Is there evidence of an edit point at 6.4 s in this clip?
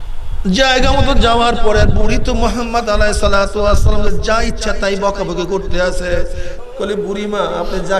yes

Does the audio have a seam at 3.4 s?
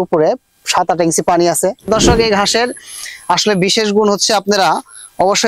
no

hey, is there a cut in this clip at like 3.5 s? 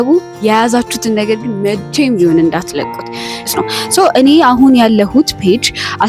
yes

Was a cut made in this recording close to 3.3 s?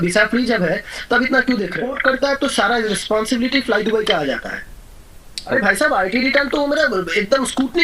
no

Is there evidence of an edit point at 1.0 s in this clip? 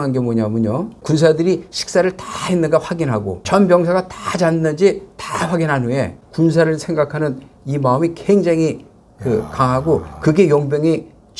yes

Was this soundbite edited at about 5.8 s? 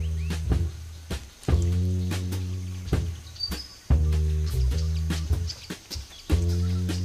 no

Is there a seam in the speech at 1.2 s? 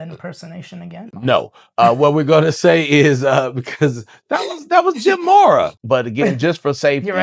yes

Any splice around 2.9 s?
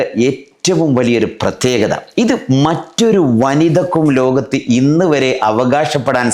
no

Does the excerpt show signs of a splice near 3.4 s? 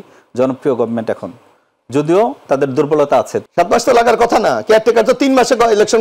yes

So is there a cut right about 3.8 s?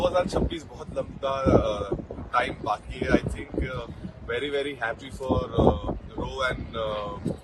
no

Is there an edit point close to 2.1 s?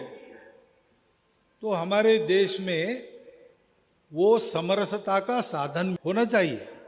no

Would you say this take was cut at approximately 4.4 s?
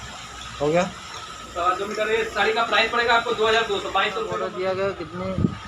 yes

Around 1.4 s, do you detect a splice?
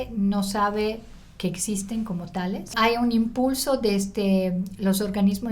no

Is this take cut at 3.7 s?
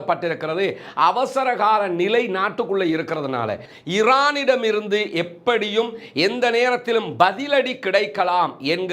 yes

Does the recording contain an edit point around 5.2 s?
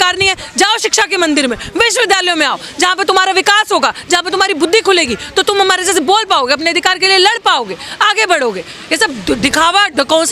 no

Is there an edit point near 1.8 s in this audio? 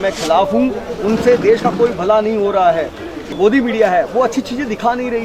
no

